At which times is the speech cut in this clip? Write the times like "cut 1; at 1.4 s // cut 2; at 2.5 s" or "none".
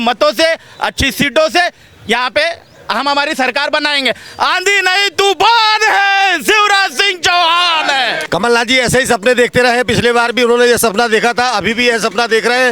cut 1; at 8.2 s